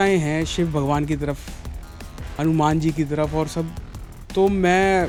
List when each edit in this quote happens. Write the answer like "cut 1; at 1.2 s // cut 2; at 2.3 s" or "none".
none